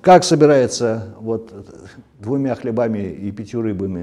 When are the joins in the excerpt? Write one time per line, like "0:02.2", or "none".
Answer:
none